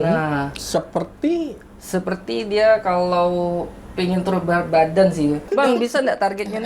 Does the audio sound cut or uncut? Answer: cut